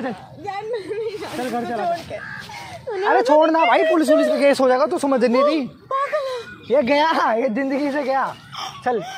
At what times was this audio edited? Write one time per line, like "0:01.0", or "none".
none